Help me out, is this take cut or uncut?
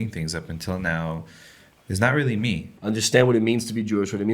cut